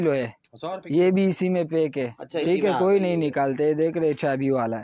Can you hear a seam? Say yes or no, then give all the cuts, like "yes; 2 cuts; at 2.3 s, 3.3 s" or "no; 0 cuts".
no; 0 cuts